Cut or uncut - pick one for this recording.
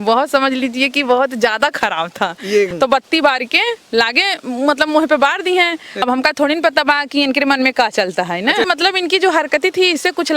cut